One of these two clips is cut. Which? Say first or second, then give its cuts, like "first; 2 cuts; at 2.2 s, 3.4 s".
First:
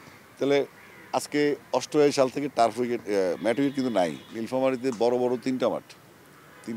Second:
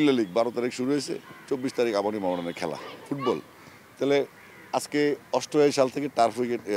first; 1 cut; at 4.3 s